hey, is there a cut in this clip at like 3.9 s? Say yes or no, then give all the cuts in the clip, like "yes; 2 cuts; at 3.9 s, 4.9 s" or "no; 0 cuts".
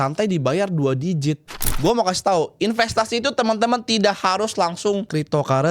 no; 1 cut; at 1.7 s